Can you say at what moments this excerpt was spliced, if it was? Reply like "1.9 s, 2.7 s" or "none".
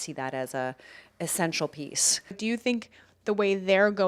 2.4 s